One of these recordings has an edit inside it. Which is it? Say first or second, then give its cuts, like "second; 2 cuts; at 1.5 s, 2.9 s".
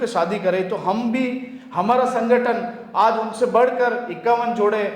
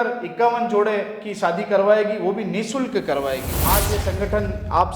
second; 1 cut; at 3.7 s